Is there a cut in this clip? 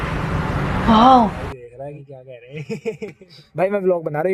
no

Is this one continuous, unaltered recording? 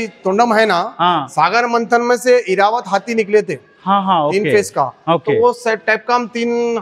yes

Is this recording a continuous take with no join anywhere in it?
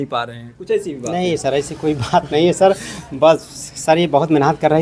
yes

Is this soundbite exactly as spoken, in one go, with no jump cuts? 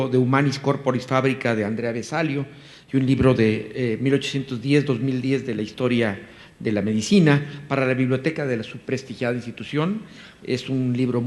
no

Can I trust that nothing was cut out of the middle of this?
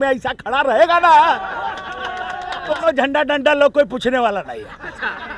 no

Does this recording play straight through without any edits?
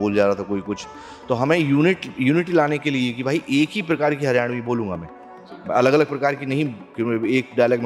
yes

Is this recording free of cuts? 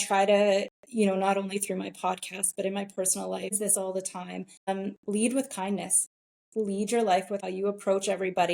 no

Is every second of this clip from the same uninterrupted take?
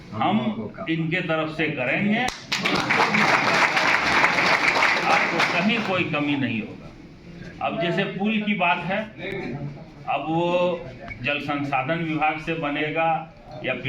yes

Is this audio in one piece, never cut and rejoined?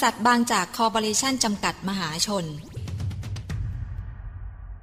no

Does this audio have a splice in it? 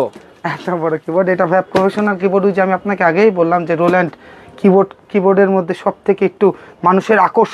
no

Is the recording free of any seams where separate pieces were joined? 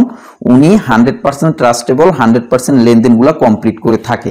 yes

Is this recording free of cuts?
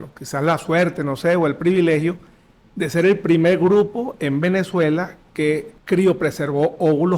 no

